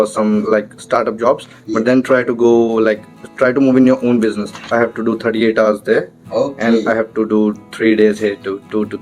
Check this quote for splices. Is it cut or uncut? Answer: cut